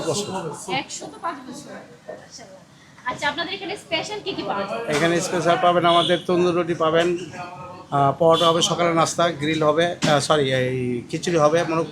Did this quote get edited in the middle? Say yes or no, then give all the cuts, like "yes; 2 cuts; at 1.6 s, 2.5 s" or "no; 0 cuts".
no; 0 cuts